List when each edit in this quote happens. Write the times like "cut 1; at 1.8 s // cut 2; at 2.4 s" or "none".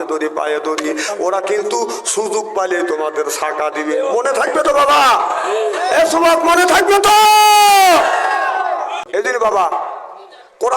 cut 1; at 9.0 s